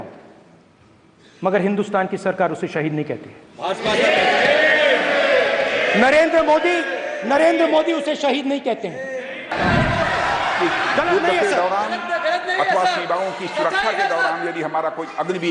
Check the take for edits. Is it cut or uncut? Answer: cut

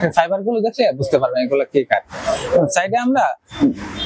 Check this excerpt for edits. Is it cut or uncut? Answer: uncut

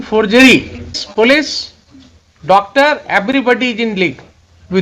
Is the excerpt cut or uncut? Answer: cut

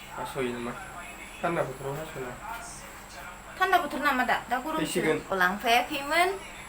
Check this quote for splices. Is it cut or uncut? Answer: cut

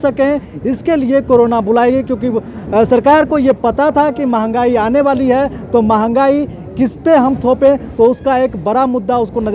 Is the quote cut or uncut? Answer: uncut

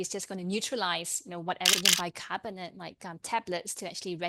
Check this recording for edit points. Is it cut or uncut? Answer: cut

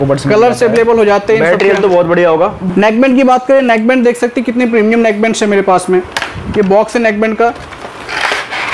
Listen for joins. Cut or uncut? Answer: cut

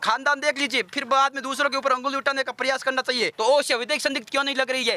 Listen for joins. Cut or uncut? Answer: cut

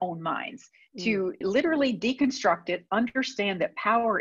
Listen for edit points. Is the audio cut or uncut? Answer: cut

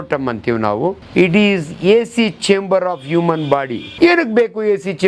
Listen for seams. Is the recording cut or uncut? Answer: cut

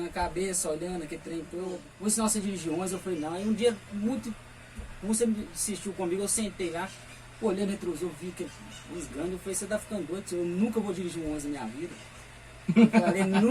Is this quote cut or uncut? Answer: cut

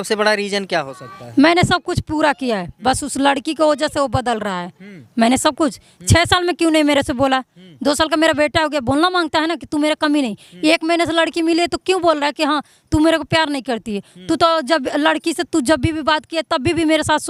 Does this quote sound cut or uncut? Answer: uncut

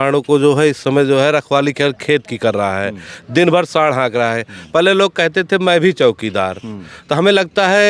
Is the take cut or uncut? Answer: uncut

